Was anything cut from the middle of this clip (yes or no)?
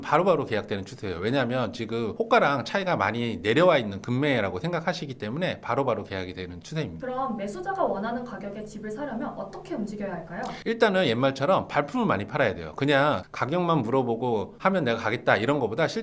no